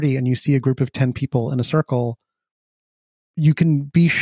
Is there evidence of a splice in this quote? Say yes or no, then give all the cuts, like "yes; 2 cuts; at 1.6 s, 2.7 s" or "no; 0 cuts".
yes; 1 cut; at 3.2 s